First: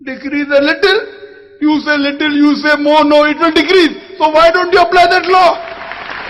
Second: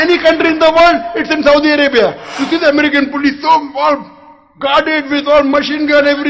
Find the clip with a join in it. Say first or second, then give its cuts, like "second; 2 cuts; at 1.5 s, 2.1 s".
second; 1 cut; at 2.3 s